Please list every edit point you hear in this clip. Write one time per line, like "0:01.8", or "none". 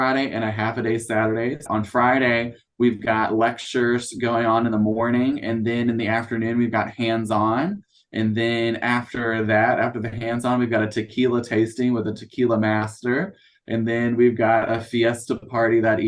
0:01.7